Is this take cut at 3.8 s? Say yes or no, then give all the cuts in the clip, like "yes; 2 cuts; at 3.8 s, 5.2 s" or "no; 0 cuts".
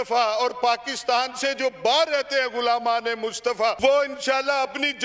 yes; 1 cut; at 3.8 s